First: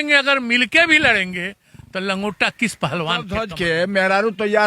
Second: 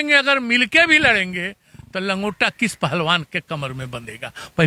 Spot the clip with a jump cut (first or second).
first